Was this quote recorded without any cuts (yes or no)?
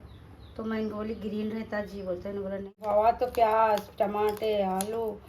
no